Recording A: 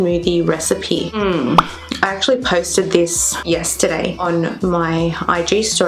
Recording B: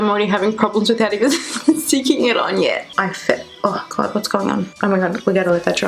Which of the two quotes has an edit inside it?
B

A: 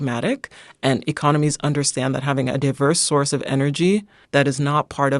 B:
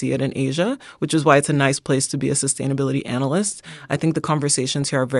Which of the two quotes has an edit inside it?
A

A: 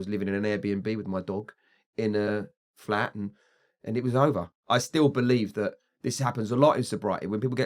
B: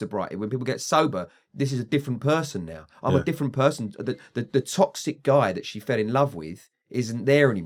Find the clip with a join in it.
A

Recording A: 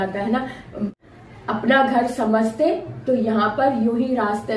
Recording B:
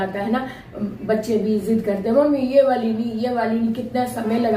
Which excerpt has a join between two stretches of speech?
A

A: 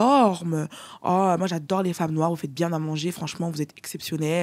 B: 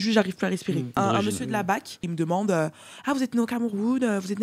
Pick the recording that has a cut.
B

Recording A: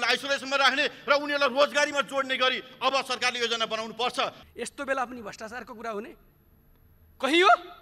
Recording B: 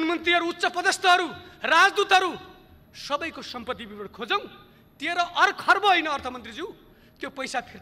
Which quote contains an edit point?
A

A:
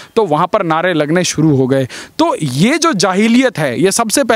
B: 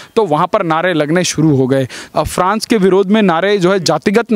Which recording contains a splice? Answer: B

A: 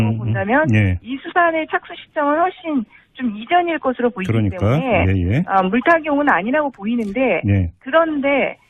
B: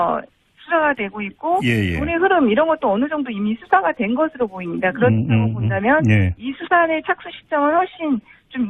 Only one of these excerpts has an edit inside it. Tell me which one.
B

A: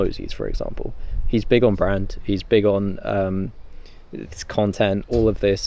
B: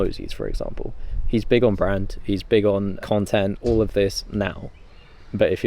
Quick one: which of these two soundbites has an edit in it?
B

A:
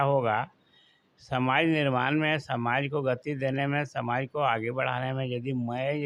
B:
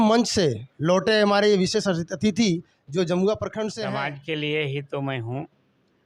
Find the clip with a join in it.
B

